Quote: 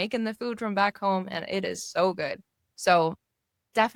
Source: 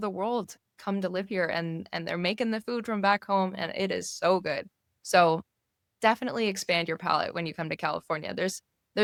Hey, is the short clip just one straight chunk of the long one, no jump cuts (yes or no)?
yes